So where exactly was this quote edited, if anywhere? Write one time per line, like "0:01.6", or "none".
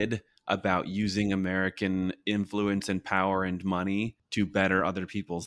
0:04.2

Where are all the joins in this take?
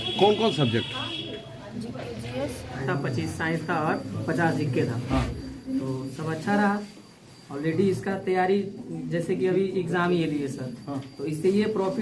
0:02.8

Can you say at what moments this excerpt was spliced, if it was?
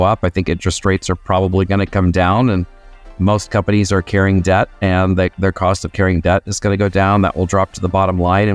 none

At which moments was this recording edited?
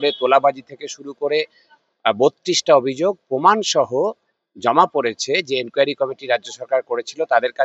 none

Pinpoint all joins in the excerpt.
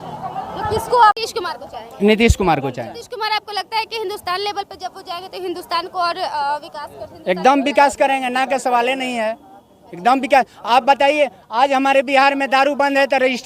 0:01.2

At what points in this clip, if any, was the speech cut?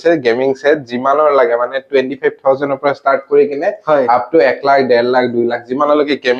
none

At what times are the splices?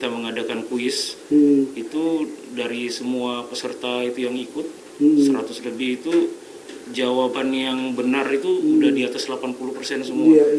none

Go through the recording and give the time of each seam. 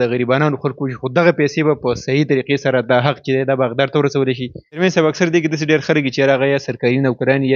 0:04.6

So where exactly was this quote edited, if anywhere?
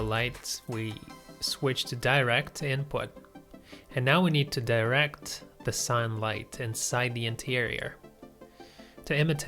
none

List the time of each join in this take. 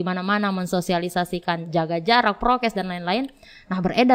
none

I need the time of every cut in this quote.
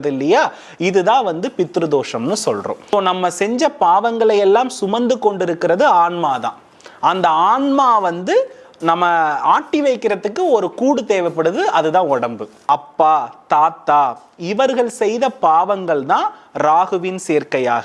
0:02.9
0:12.6

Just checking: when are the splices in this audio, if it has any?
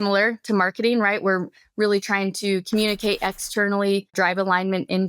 0:04.1

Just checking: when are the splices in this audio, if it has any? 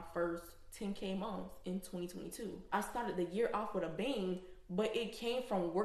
0:02.7

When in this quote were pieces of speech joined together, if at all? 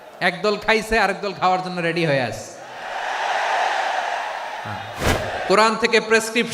0:05.0

